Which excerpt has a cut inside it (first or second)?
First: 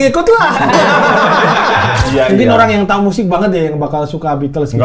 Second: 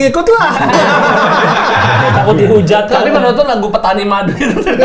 first